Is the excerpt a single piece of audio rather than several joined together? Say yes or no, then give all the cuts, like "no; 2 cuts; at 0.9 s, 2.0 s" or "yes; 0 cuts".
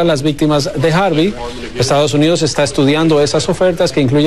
no; 1 cut; at 2.9 s